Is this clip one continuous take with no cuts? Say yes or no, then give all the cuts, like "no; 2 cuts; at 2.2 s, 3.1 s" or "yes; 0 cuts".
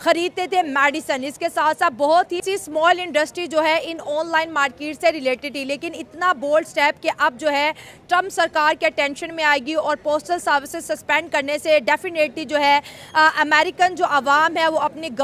yes; 0 cuts